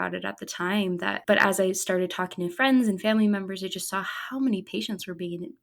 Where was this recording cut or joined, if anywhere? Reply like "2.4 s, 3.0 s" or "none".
1.2 s